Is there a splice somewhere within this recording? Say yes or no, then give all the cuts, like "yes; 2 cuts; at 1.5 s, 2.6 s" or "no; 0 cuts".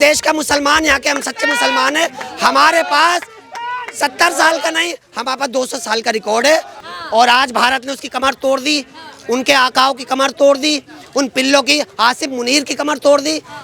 yes; 1 cut; at 6.8 s